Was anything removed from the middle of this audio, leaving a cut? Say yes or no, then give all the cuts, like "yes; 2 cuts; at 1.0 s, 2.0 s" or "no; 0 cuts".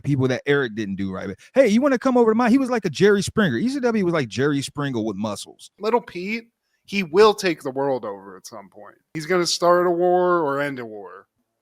yes; 1 cut; at 5.6 s